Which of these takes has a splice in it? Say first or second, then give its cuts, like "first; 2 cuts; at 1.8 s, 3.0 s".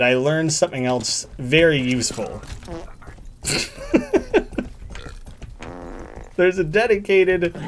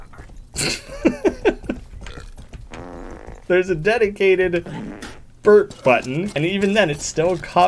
second; 1 cut; at 6.3 s